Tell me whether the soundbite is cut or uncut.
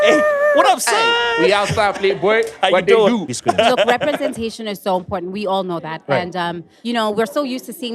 cut